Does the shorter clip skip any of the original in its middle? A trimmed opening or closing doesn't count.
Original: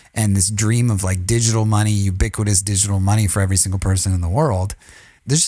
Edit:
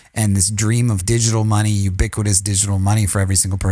yes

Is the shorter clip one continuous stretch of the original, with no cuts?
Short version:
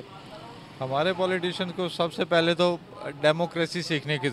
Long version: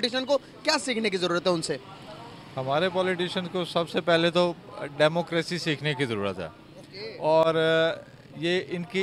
yes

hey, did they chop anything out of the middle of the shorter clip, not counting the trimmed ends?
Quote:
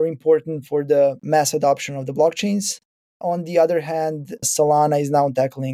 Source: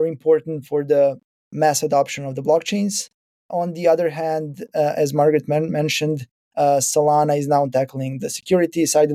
yes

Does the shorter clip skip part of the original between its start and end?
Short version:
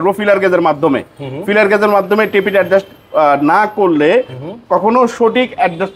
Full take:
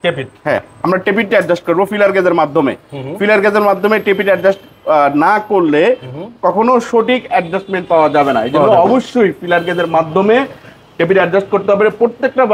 no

